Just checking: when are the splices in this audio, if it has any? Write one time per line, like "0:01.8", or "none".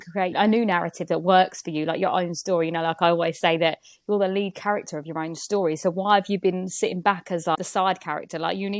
0:07.5